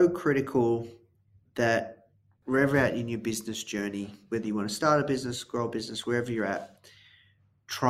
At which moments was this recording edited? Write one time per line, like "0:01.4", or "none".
0:02.3